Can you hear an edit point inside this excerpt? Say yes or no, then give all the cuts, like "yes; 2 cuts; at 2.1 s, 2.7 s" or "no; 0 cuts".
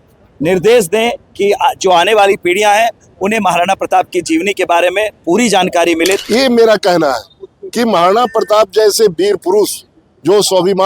yes; 1 cut; at 6.2 s